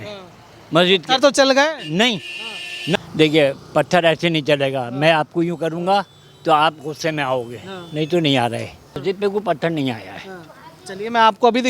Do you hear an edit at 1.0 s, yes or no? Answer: no